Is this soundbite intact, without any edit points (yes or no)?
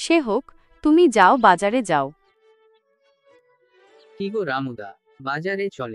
no